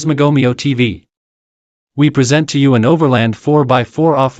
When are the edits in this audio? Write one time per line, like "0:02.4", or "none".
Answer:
none